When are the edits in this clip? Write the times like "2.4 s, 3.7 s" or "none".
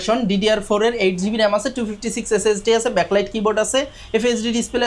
none